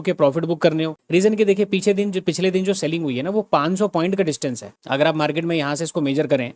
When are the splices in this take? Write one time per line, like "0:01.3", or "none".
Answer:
none